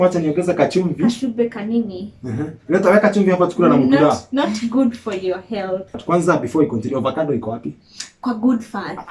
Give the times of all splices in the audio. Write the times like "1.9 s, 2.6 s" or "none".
5.9 s